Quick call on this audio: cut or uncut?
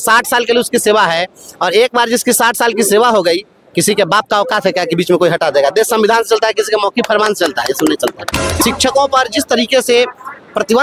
cut